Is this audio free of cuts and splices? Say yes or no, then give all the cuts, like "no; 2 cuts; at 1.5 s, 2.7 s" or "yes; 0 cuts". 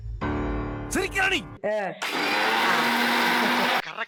yes; 0 cuts